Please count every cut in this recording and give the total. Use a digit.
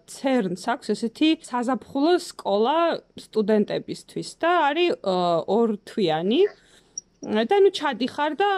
1